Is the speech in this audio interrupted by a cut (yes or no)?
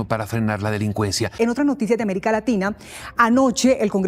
yes